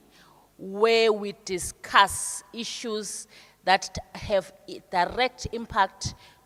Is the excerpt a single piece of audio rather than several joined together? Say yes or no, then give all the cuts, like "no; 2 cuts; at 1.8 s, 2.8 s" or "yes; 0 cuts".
yes; 0 cuts